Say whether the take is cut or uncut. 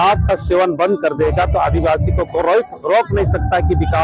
uncut